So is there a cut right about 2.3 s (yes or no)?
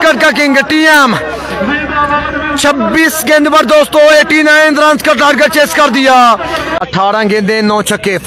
no